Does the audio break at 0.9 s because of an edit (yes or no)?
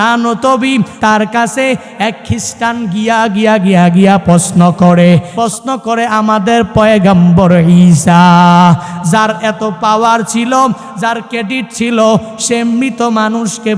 yes